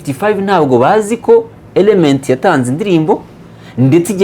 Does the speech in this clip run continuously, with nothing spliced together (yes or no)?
yes